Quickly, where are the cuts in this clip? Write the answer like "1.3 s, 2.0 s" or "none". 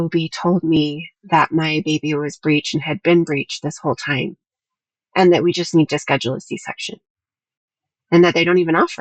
none